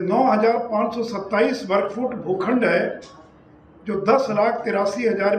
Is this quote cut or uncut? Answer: uncut